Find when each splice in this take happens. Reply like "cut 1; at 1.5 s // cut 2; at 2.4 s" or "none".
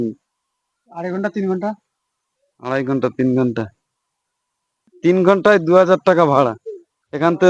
cut 1; at 4.9 s